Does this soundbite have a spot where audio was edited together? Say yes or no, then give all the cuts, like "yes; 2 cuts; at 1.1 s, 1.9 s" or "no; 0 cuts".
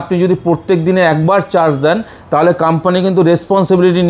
no; 0 cuts